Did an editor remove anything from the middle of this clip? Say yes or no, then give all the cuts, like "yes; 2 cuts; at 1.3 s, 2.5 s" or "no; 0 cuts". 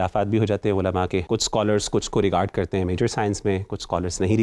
yes; 1 cut; at 1.2 s